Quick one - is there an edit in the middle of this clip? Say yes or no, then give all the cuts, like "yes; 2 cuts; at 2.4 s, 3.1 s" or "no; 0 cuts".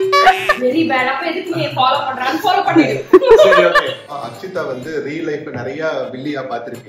yes; 1 cut; at 4.0 s